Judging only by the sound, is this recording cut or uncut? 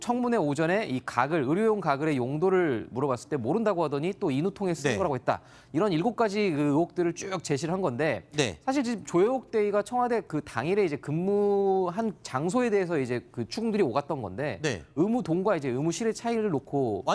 cut